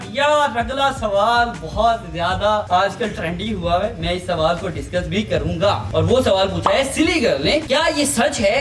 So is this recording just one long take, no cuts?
yes; 0 cuts

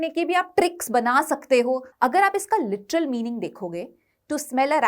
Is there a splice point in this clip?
yes; 1 cut; at 1.9 s

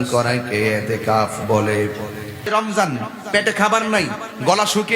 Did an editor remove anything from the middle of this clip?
yes; 1 cut; at 2.5 s

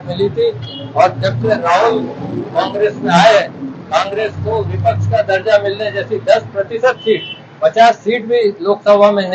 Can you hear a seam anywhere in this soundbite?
no; 0 cuts

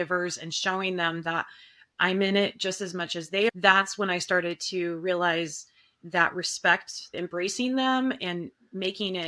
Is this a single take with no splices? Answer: no; 2 cuts; at 3.5 s, 7.0 s

